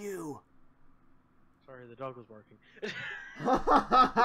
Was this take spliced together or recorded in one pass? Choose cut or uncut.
uncut